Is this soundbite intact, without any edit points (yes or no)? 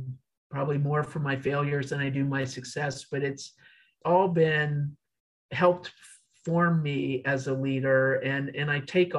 no